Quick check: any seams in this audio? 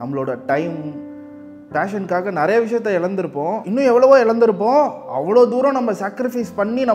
no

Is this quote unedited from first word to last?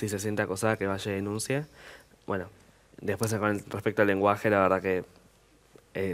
yes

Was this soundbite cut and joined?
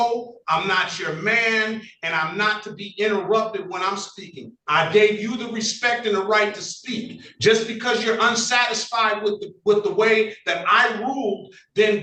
no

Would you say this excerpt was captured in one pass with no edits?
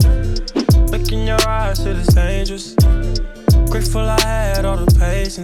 yes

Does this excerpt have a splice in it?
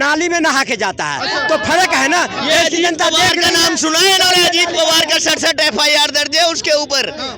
no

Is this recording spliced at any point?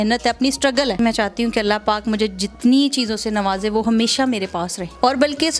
yes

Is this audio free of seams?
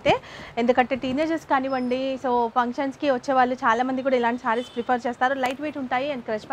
yes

